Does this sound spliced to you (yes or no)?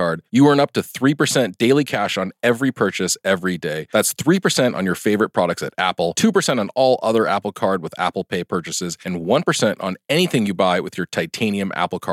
no